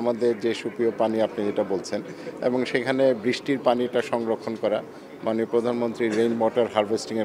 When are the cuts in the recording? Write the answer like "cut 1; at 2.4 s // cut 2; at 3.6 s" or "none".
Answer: none